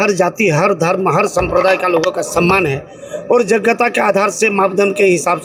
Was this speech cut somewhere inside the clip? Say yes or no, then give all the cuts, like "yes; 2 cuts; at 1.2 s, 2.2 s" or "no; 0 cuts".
no; 0 cuts